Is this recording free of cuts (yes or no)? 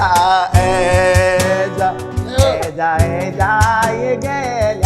yes